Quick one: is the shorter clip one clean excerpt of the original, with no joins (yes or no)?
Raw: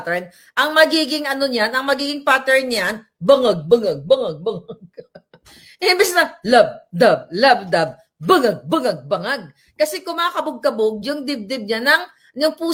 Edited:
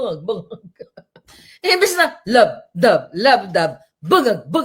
yes